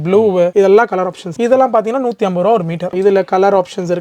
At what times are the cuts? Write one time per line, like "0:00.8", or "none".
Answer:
0:01.2
0:02.9